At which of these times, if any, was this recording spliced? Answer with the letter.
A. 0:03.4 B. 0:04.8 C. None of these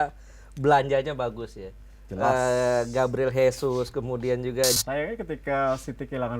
B